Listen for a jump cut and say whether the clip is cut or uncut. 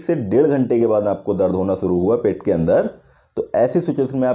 uncut